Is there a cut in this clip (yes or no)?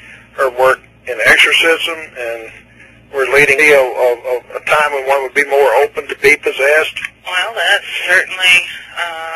no